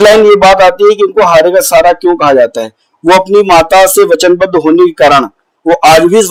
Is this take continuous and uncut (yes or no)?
yes